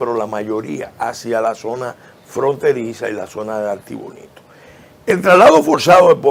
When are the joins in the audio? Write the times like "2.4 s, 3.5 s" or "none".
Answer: none